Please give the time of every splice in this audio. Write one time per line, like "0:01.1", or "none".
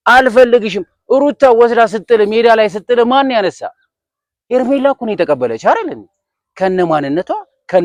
none